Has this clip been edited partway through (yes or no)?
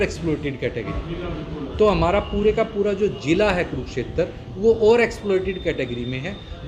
no